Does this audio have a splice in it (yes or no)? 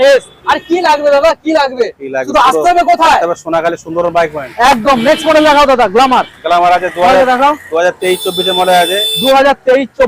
no